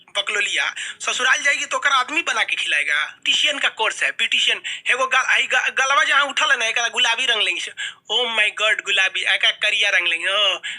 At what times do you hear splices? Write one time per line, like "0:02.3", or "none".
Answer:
0:03.2